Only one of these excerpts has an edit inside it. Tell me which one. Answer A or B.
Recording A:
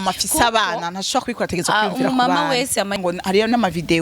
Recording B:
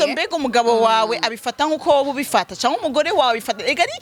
A